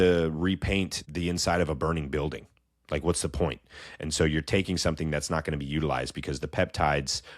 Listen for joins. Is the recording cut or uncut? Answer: cut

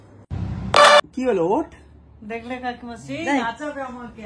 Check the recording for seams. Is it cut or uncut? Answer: cut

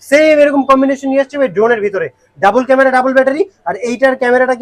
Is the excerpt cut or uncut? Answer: uncut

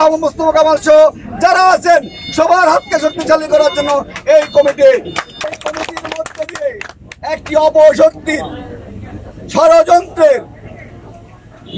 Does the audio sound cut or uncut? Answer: cut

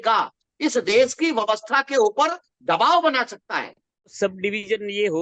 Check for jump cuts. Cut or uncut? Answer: cut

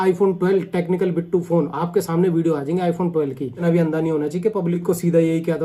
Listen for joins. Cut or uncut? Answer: uncut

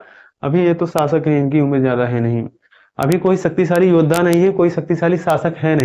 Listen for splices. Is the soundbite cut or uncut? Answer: uncut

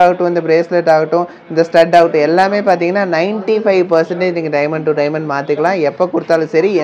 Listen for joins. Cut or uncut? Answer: uncut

